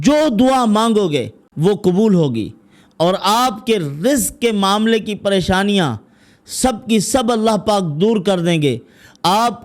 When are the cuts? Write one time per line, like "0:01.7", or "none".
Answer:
0:01.4